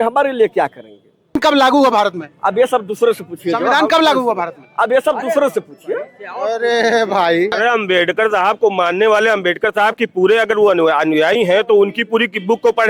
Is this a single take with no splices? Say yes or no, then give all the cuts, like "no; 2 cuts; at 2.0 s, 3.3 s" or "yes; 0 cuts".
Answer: no; 2 cuts; at 1.4 s, 7.5 s